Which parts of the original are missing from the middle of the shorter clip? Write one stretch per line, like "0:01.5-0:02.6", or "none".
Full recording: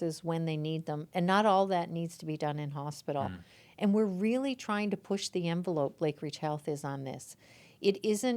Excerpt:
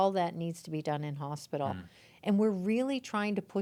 none